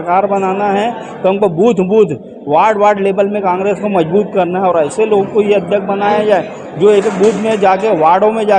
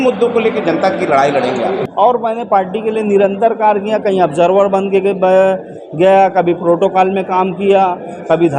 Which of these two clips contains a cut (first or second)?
second